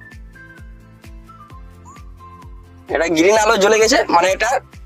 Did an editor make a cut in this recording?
no; 0 cuts

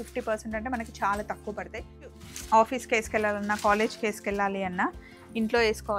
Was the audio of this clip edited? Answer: yes; 1 cut; at 2.2 s

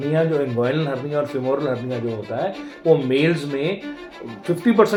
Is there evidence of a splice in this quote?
no; 0 cuts

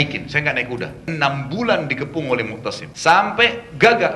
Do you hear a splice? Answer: yes; 2 cuts; at 1.0 s, 2.9 s

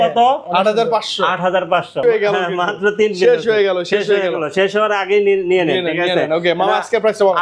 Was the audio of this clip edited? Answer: yes; 1 cut; at 2.0 s

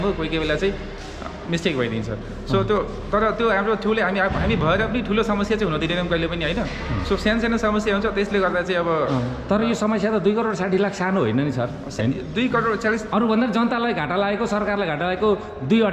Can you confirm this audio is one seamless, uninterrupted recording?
yes; 0 cuts

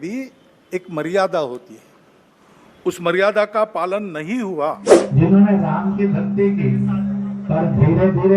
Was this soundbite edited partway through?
yes; 1 cut; at 4.9 s

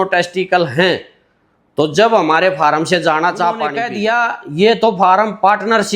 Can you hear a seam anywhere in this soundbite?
yes; 1 cut; at 3.9 s

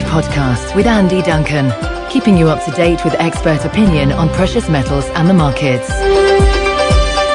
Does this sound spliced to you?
yes; 1 cut; at 5.6 s

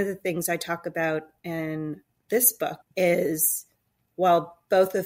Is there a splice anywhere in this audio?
yes; 1 cut; at 2.8 s

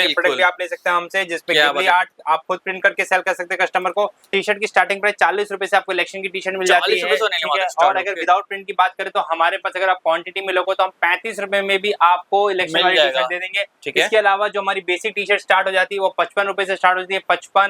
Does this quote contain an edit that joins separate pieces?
yes; 1 cut; at 4.2 s

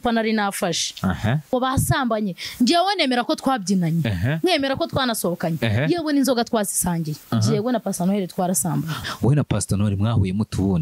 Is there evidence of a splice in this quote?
yes; 3 cuts; at 1.5 s, 7.2 s, 8.9 s

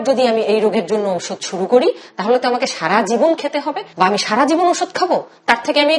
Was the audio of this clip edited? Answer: yes; 1 cut; at 3.8 s

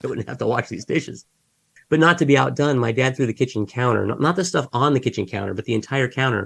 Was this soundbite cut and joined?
yes; 1 cut; at 1.7 s

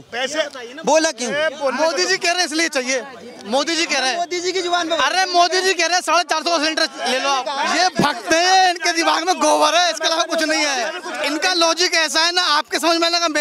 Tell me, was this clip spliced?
yes; 2 cuts; at 7.5 s, 11.1 s

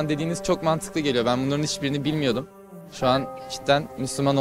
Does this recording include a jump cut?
no; 0 cuts

